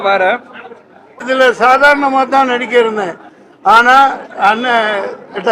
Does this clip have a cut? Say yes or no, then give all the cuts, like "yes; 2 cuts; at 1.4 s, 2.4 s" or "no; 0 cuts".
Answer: yes; 1 cut; at 1.2 s